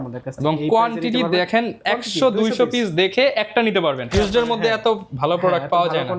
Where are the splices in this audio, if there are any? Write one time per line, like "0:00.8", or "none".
0:04.1